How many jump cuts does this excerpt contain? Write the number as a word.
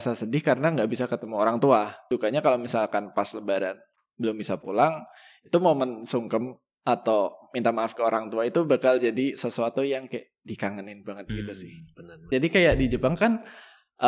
two